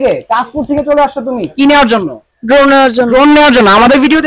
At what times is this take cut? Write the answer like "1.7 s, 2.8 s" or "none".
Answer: none